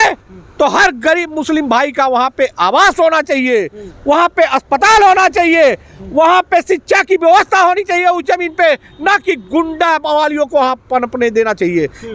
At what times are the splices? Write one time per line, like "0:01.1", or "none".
none